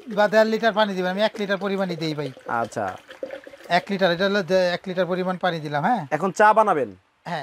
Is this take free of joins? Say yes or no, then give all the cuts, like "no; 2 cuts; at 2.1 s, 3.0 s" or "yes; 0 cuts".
yes; 0 cuts